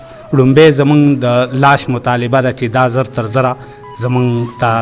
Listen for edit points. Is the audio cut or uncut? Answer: uncut